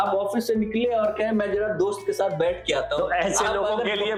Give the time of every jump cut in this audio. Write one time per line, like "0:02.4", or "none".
none